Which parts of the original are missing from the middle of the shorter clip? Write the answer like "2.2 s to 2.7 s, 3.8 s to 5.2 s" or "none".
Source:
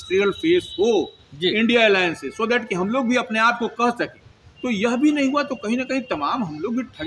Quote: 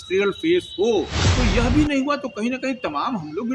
1.2 s to 4.5 s